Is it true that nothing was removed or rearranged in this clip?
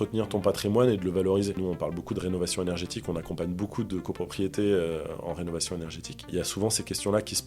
no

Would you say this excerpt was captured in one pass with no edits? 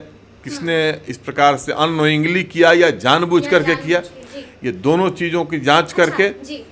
yes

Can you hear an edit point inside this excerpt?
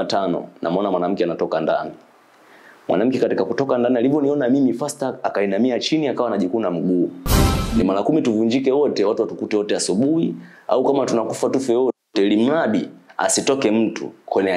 yes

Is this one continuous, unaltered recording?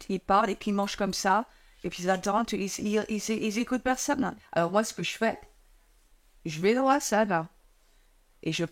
yes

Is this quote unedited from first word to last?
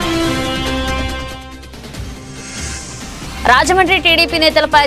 yes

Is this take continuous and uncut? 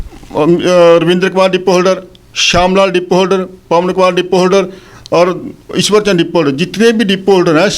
yes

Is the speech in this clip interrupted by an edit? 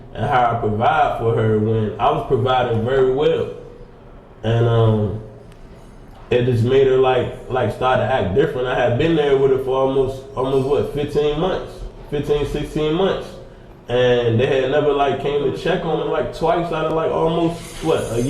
yes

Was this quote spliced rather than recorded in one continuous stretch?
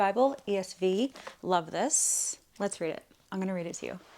yes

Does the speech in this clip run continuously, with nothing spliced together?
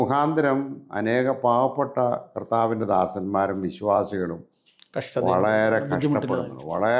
yes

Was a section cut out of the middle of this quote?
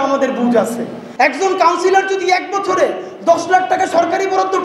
yes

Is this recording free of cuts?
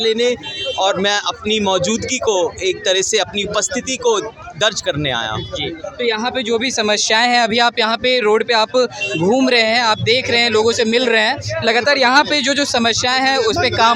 yes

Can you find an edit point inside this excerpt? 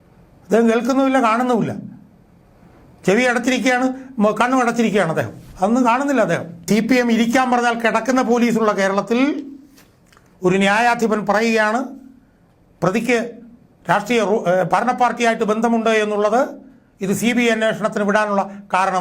yes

